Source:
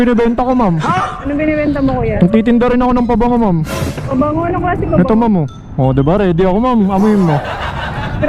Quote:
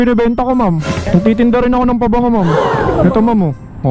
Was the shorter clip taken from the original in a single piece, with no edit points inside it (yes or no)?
no